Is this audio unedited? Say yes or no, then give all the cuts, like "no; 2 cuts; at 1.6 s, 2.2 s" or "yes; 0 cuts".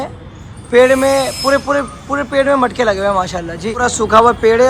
no; 1 cut; at 3.7 s